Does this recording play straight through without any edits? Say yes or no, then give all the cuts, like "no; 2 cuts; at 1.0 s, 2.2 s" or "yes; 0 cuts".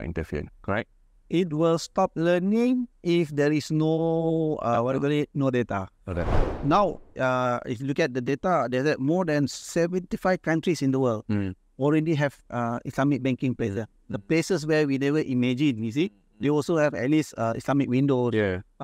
no; 1 cut; at 6.5 s